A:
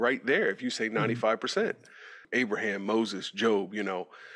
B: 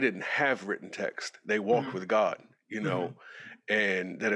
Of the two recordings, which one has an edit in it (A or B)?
A